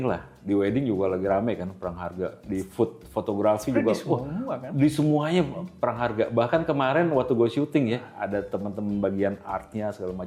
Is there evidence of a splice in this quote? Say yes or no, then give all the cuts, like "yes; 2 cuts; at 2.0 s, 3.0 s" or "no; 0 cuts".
no; 0 cuts